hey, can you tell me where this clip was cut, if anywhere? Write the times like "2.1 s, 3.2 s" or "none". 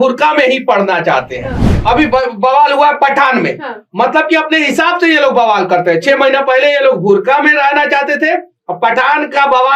1.8 s